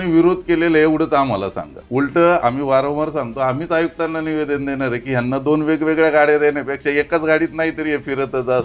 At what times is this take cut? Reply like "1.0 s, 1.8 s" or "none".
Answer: 1.7 s, 2.4 s